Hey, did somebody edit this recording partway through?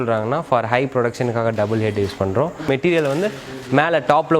yes; 1 cut; at 2.7 s

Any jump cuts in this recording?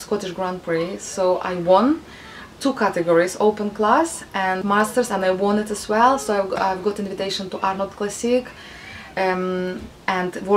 yes; 1 cut; at 4.6 s

